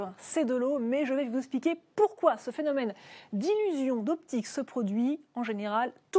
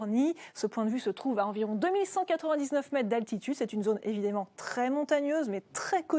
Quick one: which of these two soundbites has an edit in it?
second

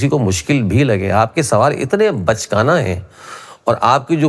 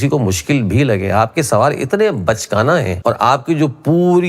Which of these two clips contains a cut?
second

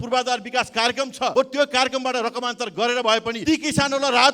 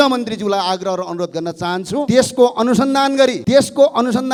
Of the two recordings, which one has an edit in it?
first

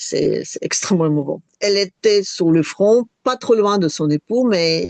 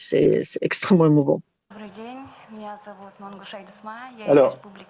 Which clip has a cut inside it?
first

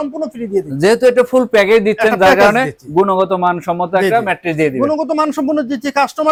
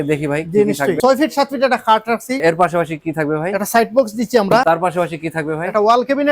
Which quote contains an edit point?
second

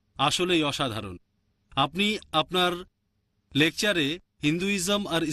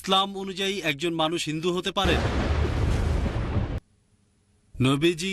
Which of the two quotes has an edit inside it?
second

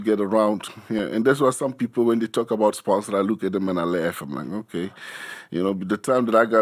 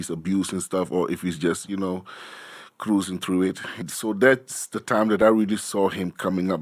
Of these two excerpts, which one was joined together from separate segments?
second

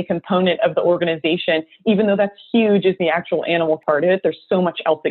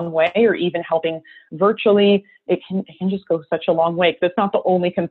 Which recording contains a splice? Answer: first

